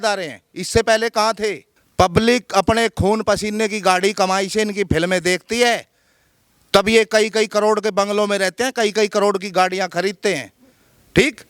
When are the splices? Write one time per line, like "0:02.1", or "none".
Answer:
0:01.7